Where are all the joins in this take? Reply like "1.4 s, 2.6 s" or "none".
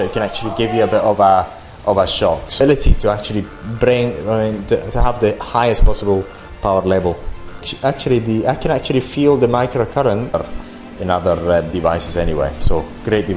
2.6 s, 10.3 s